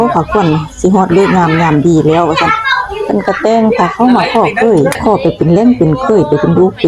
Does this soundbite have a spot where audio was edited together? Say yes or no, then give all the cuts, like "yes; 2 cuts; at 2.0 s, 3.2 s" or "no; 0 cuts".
yes; 1 cut; at 5.0 s